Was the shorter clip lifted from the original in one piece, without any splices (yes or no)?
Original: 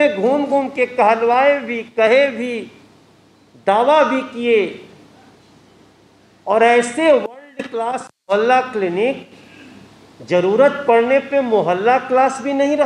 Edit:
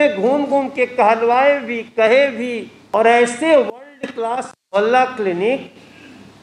no